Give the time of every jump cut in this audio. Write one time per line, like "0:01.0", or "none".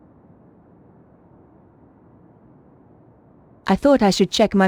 0:03.6